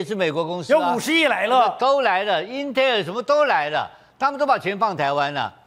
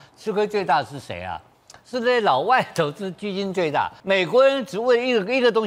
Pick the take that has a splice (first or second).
second